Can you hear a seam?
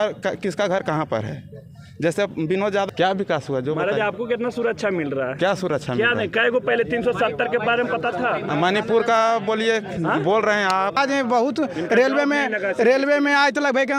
yes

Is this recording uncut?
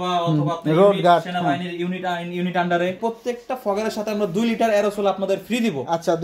no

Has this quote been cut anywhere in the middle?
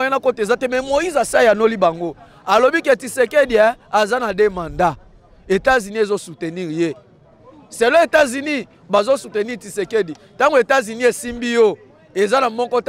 no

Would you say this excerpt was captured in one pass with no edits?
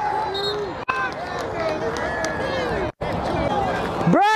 yes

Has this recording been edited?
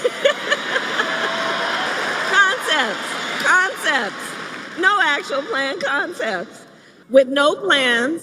yes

